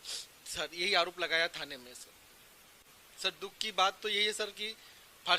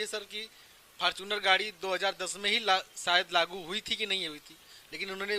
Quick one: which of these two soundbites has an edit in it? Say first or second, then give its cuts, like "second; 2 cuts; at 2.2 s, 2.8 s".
first; 1 cut; at 2.8 s